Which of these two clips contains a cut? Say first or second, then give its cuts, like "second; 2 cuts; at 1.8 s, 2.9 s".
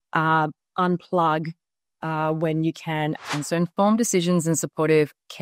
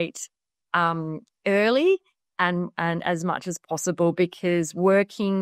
first; 1 cut; at 3.3 s